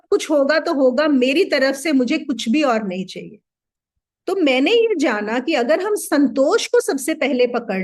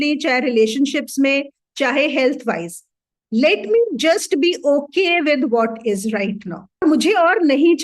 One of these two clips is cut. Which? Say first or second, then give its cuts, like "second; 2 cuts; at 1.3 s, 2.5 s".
second; 1 cut; at 6.8 s